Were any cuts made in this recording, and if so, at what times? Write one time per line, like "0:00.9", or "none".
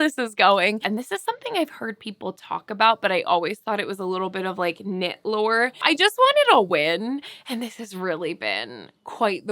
0:00.8
0:05.8